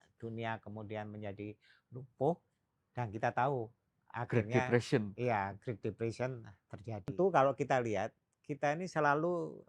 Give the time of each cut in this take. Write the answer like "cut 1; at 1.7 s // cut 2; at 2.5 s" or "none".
cut 1; at 7.1 s